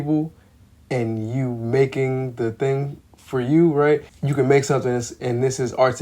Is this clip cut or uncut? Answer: cut